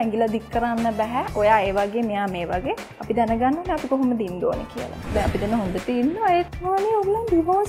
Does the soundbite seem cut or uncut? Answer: cut